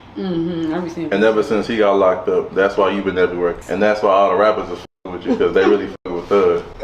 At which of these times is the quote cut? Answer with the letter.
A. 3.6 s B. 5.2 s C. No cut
A